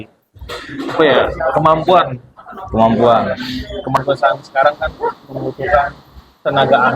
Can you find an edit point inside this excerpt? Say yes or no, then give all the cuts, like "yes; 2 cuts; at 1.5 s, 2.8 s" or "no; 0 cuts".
yes; 1 cut; at 4.0 s